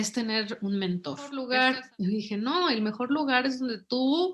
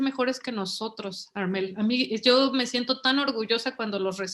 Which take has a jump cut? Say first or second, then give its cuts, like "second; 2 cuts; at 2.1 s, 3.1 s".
first; 1 cut; at 1.4 s